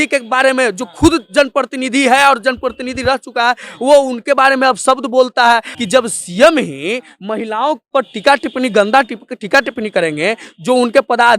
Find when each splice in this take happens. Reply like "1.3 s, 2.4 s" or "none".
5.7 s